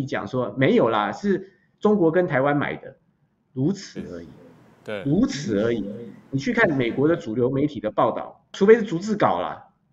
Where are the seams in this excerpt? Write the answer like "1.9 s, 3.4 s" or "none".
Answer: 8.5 s